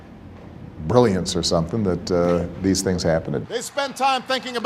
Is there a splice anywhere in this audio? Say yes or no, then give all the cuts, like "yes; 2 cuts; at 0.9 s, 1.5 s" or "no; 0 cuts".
yes; 1 cut; at 3.4 s